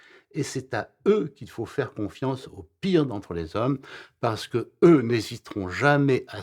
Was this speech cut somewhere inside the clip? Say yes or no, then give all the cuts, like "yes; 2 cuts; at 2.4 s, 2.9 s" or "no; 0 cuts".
no; 0 cuts